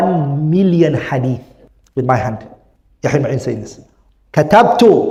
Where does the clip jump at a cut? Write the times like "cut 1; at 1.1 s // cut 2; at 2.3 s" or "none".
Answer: none